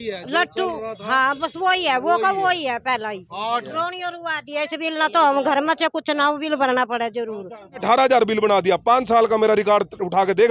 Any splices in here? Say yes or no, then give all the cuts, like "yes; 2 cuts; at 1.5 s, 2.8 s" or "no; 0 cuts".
yes; 2 cuts; at 3.7 s, 7.8 s